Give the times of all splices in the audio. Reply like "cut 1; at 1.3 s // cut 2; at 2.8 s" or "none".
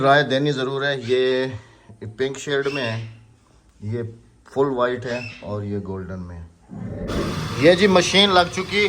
cut 1; at 7.0 s